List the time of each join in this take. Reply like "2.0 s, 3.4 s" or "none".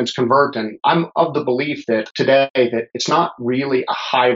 0.8 s, 2.1 s

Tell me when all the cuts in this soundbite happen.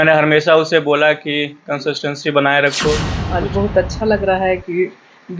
3.1 s

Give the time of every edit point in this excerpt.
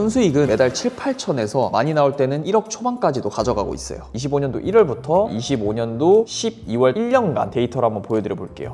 4.1 s

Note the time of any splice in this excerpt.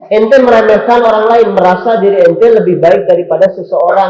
none

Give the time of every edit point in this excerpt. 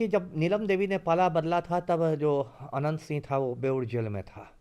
none

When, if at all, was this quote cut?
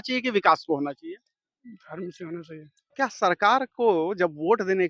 2.8 s

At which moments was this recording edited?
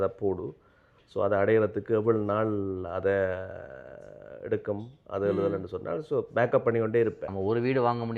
7.3 s

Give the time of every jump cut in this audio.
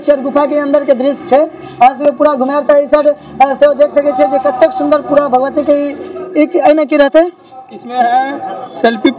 none

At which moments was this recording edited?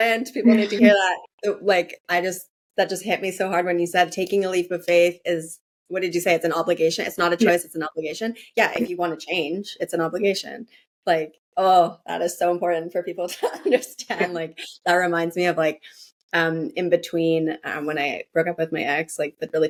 none

